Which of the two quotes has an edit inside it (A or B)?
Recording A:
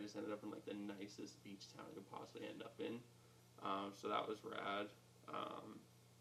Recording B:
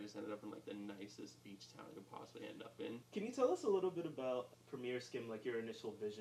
B